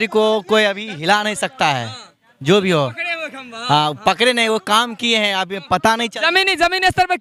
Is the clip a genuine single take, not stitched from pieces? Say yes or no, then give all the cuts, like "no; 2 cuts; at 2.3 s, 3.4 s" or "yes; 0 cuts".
yes; 0 cuts